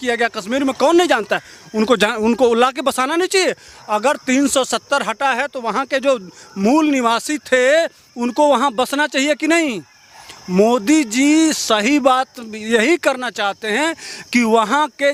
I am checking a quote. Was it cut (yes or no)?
no